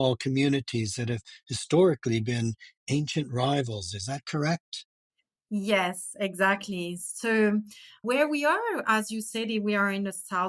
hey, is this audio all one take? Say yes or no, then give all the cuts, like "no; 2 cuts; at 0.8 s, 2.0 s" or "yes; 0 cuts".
yes; 0 cuts